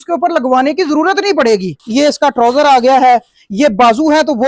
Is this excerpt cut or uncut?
cut